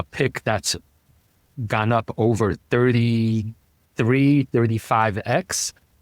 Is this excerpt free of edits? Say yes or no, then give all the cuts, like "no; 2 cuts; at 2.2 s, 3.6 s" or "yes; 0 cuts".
yes; 0 cuts